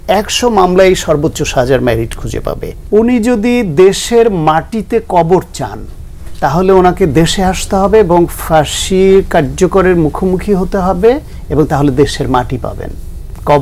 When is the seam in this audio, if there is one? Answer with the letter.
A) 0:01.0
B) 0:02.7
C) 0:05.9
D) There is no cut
B